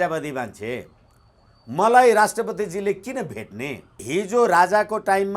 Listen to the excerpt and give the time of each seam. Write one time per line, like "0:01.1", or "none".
0:04.0

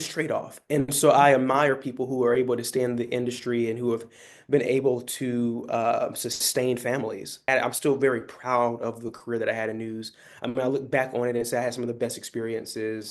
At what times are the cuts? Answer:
0:07.5

